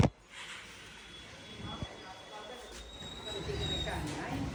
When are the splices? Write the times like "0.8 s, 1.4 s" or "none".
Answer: none